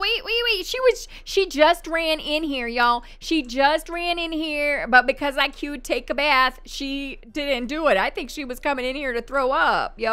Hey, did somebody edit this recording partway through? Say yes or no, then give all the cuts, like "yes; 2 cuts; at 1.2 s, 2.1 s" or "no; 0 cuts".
no; 0 cuts